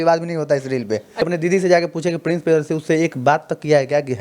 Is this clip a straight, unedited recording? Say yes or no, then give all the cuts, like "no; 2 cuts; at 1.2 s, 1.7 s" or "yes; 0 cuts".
no; 1 cut; at 1.2 s